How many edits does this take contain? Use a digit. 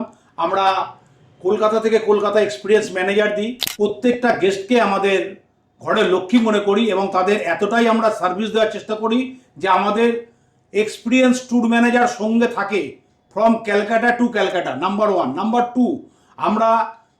1